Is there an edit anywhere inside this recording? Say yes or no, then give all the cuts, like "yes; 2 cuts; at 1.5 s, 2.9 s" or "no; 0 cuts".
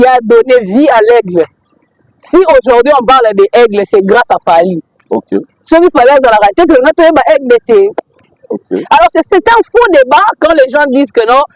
no; 0 cuts